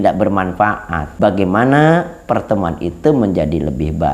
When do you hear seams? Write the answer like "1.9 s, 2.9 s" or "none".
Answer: 1.0 s